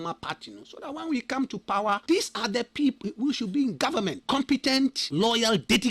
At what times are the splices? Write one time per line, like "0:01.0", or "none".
0:02.0
0:03.0
0:04.2
0:05.0